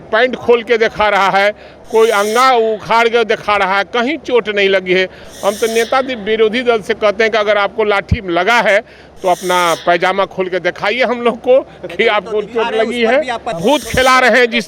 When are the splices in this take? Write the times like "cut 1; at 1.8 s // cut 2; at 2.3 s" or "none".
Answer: cut 1; at 13.5 s